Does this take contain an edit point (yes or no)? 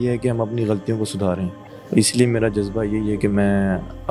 no